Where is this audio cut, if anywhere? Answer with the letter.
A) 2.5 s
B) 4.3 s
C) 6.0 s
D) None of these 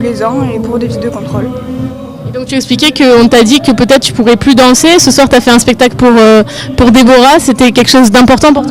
C